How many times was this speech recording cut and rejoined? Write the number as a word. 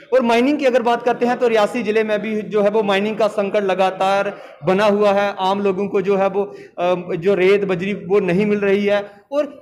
zero